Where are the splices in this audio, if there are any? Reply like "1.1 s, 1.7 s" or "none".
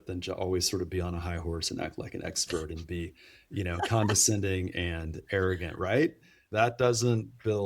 6.4 s